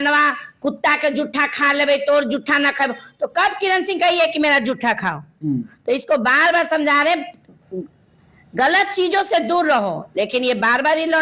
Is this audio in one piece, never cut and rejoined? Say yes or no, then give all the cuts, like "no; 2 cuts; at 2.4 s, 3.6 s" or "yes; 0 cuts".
yes; 0 cuts